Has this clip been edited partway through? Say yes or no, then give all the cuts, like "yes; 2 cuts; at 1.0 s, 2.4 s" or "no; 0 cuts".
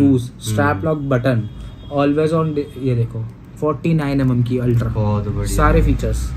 no; 0 cuts